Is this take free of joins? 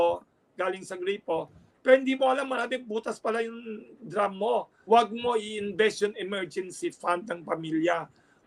no; 1 cut; at 4.7 s

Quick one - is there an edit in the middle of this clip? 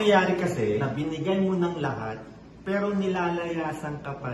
yes; 1 cut; at 0.9 s

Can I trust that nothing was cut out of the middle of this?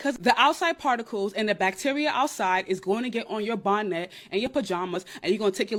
yes; 0 cuts

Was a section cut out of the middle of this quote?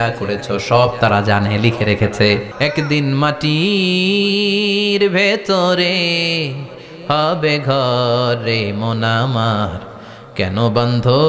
yes; 1 cut; at 2.5 s

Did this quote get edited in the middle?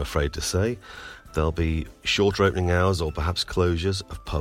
no; 0 cuts

